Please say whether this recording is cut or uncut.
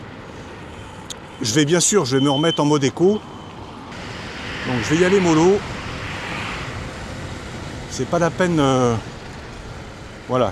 cut